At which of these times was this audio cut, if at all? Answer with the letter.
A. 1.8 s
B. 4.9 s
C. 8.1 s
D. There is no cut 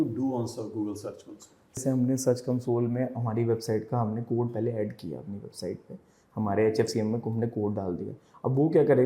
A